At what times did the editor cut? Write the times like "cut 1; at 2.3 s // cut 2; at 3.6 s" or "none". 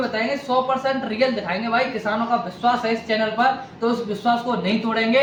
none

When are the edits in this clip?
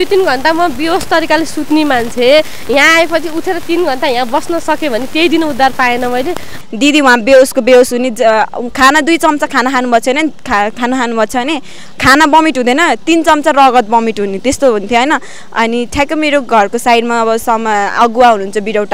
cut 1; at 6.5 s

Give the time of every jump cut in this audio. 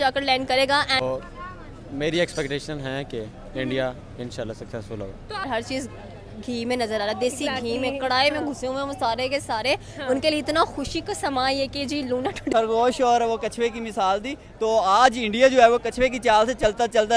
cut 1; at 1.0 s // cut 2; at 5.5 s // cut 3; at 12.5 s

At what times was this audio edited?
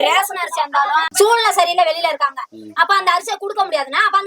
cut 1; at 1.1 s

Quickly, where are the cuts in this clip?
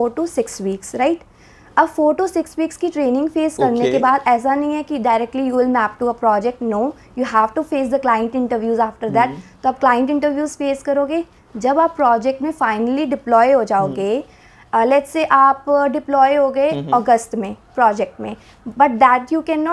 none

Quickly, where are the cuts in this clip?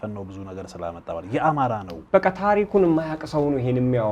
cut 1; at 1.9 s

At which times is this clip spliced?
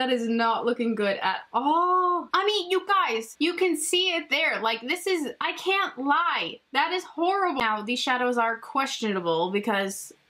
none

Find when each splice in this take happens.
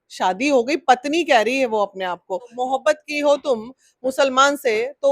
cut 1; at 2.5 s

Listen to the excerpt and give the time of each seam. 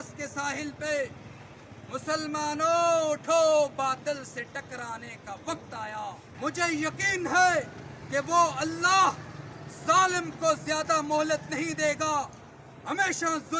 cut 1; at 6.2 s

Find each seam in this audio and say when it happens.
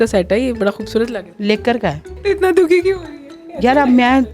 cut 1; at 1.3 s // cut 2; at 2.1 s

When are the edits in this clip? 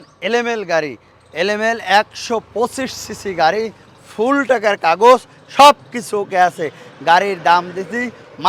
none

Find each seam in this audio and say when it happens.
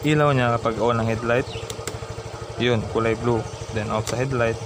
none

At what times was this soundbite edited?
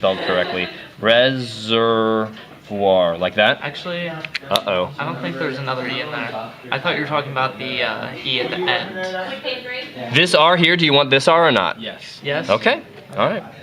none

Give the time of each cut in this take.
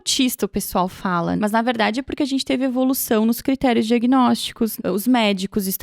cut 1; at 1.4 s // cut 2; at 4.7 s

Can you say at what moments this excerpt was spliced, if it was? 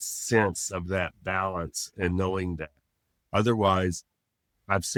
none

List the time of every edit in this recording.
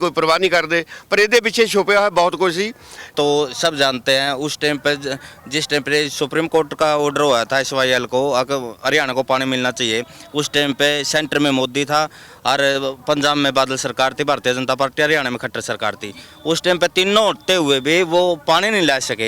cut 1; at 3.1 s

